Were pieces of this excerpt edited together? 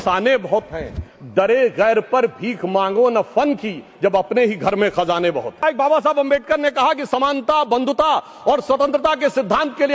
yes; 1 cut; at 5.6 s

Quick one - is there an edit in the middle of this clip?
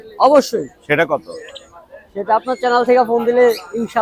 no; 0 cuts

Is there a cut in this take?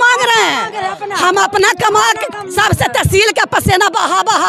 no; 0 cuts

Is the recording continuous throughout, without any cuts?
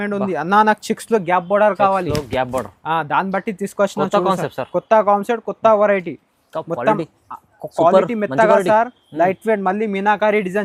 yes; 0 cuts

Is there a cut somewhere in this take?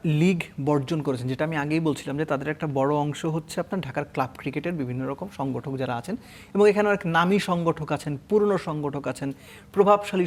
no; 0 cuts

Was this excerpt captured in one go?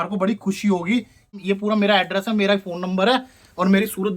no; 1 cut; at 1.4 s

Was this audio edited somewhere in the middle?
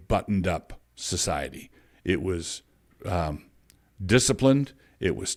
no; 0 cuts

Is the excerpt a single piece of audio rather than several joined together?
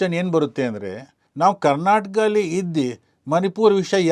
yes; 0 cuts

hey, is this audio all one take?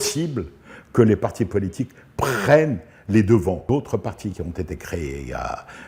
no; 1 cut; at 3.6 s

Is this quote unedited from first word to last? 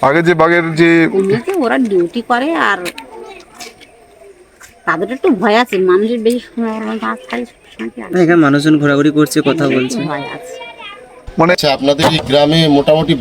no; 1 cut; at 11.5 s

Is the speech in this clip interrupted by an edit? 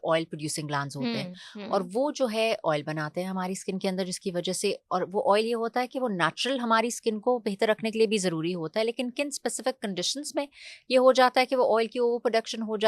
no; 0 cuts

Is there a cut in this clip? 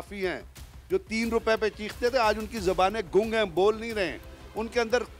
no; 0 cuts

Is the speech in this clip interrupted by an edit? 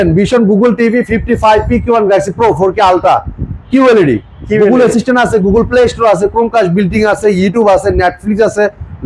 no; 0 cuts

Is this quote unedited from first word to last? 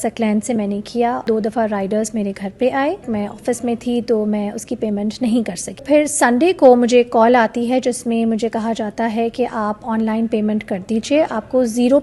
no; 3 cuts; at 1.3 s, 3.1 s, 5.8 s

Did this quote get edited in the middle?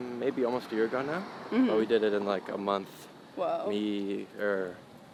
no; 0 cuts

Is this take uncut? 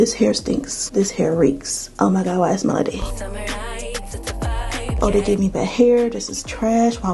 no; 2 cuts; at 3.0 s, 5.0 s

